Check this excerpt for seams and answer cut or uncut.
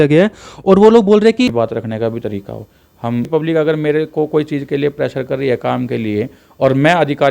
cut